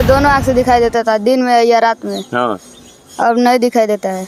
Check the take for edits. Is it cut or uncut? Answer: uncut